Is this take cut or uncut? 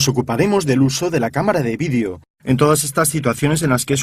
cut